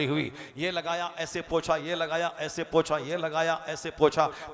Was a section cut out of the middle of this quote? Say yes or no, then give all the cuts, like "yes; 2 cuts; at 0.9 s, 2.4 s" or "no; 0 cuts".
no; 0 cuts